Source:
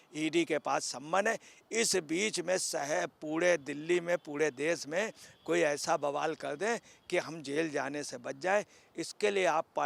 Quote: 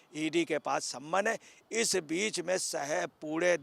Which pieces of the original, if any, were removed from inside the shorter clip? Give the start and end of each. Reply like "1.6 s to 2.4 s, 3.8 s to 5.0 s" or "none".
none